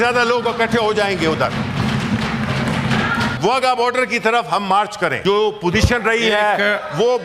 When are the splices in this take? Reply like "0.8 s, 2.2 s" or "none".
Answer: 3.4 s, 5.2 s